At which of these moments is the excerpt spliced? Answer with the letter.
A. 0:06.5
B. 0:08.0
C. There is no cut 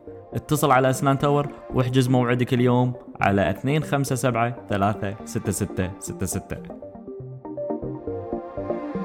A